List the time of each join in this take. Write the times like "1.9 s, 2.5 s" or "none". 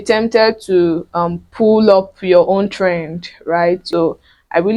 3.8 s